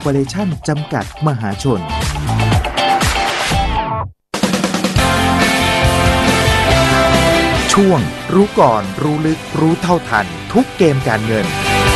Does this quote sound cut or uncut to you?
cut